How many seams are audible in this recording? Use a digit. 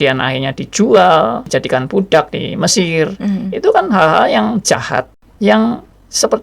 2